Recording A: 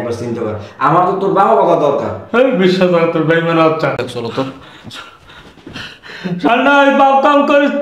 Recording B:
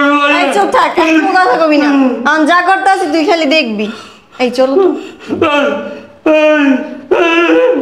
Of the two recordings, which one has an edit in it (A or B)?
A